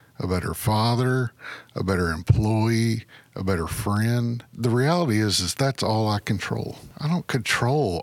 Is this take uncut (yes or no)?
no